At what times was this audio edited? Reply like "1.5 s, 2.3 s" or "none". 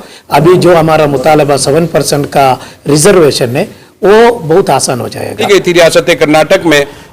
5.5 s